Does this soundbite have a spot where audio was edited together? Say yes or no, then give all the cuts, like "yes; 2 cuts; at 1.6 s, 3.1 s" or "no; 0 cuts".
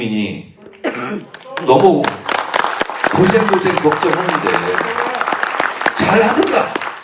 no; 0 cuts